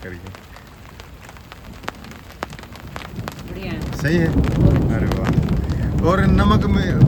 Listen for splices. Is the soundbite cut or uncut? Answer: uncut